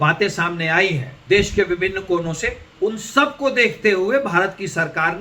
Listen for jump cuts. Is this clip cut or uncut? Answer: cut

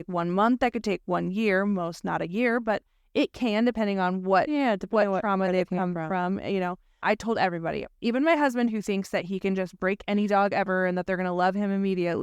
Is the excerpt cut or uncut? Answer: cut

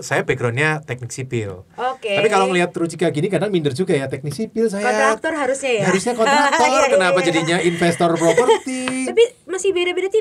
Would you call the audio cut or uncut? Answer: uncut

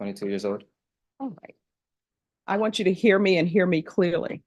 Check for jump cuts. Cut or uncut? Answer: uncut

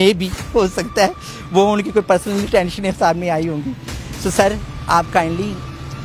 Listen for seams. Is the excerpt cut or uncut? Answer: uncut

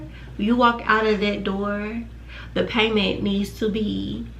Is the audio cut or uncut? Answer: uncut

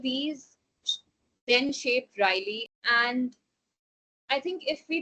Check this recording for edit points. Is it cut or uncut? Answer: cut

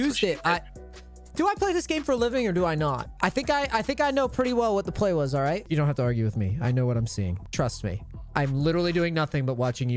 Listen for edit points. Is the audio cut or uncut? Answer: cut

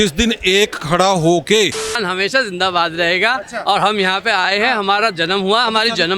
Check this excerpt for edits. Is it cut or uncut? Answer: cut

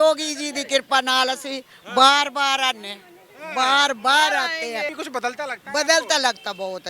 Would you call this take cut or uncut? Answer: cut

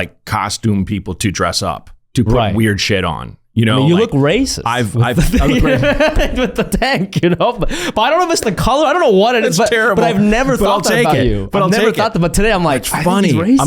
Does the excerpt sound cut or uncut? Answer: uncut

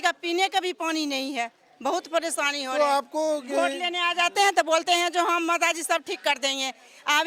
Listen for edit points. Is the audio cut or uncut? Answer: uncut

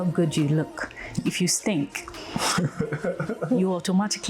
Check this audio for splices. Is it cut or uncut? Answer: uncut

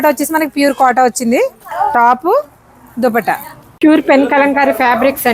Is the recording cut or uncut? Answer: cut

